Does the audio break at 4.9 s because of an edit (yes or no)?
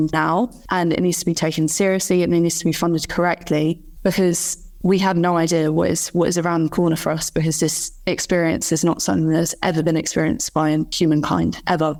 no